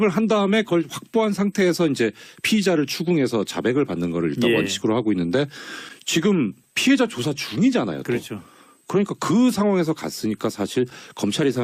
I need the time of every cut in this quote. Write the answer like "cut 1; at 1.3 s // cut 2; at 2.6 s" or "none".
none